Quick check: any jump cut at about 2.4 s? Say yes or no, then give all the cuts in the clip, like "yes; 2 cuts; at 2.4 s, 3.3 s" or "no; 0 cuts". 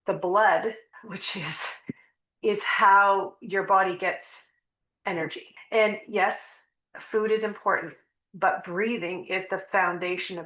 no; 2 cuts; at 0.9 s, 5.5 s